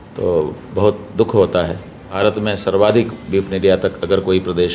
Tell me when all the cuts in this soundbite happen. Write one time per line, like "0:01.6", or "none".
0:02.0